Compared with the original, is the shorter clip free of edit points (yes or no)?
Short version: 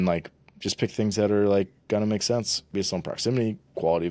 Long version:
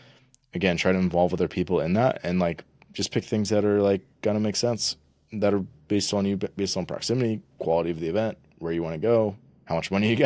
no